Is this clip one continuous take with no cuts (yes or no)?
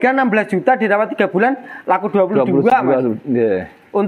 yes